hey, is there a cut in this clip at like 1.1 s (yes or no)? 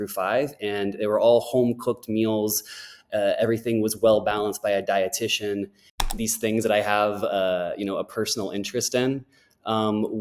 no